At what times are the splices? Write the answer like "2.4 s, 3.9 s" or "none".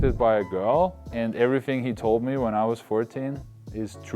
1.0 s